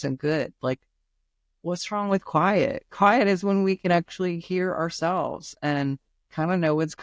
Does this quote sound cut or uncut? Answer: uncut